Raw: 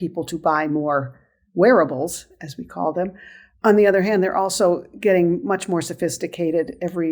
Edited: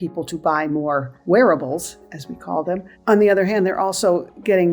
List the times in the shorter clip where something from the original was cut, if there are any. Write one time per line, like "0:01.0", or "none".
0:01.1
0:02.9

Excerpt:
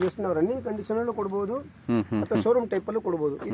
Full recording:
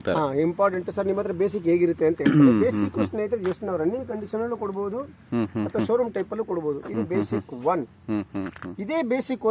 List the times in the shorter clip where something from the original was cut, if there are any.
none

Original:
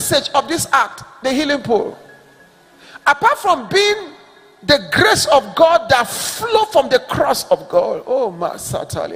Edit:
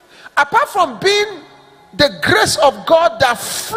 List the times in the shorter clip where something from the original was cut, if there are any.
none

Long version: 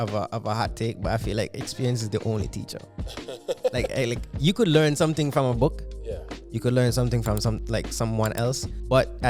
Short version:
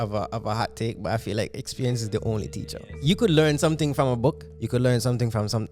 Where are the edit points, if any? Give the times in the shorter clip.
0:02.9
0:04.5

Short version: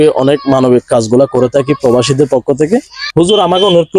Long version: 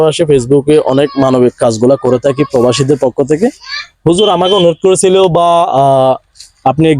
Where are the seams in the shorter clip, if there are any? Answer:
0:03.0

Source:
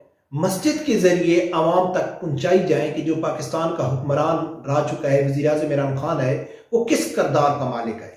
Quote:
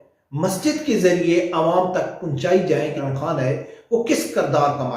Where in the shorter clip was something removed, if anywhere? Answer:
0:03.0

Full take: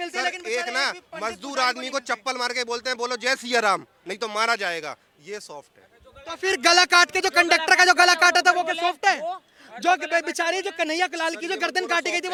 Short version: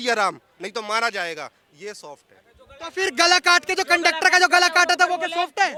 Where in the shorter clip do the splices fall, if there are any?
none

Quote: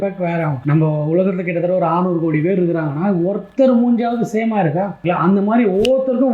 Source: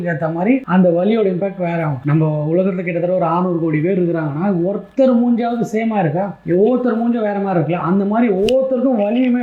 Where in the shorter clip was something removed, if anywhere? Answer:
0:05.0

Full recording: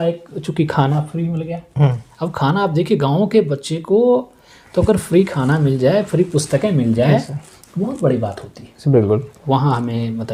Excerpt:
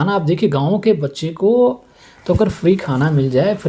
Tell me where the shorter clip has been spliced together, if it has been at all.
none

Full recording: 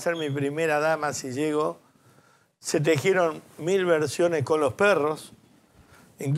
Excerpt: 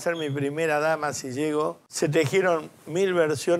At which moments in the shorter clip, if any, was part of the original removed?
0:01.8

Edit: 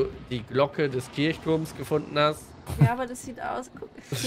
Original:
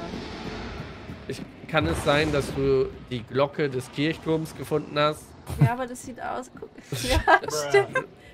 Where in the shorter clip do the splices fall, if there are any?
none

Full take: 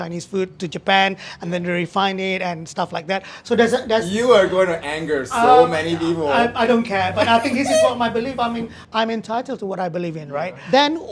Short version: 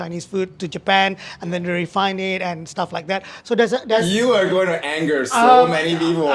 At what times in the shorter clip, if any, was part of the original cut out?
none

